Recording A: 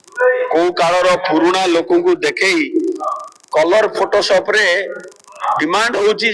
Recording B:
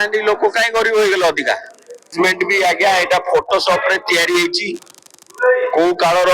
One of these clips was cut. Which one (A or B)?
B